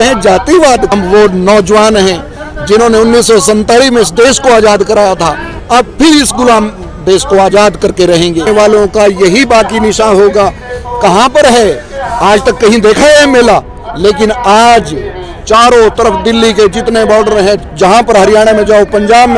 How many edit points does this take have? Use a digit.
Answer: 2